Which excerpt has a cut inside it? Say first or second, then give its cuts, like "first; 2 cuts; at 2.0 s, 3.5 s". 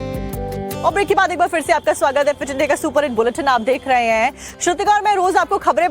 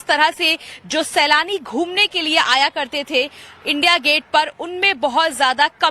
second; 1 cut; at 3.9 s